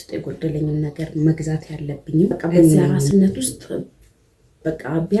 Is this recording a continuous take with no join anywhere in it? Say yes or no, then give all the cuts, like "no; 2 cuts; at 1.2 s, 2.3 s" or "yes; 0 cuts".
no; 1 cut; at 2.9 s